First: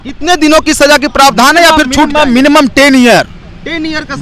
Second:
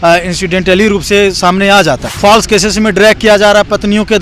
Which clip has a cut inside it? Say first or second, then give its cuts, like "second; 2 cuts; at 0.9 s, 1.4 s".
second; 1 cut; at 2.1 s